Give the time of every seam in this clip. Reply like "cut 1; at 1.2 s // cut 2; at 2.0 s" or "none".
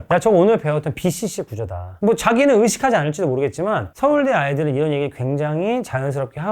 cut 1; at 1.9 s